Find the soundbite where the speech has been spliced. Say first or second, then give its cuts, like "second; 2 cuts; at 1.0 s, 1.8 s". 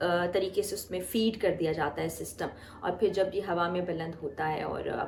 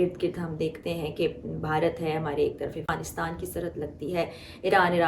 second; 1 cut; at 2.9 s